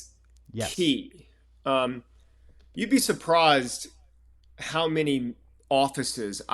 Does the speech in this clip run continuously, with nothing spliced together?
no; 1 cut; at 5.5 s

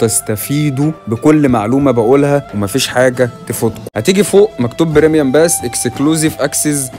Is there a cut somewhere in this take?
yes; 1 cut; at 3.9 s

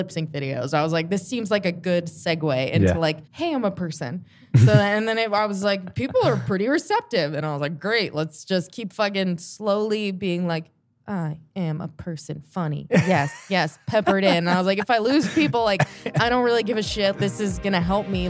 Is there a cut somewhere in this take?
no; 0 cuts

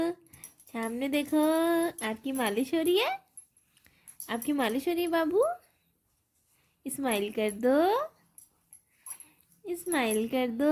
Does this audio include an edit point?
no; 0 cuts

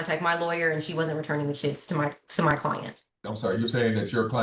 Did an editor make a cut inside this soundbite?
yes; 1 cut; at 3.2 s

